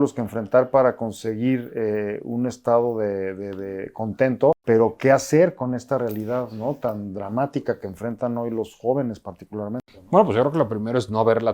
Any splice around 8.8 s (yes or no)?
no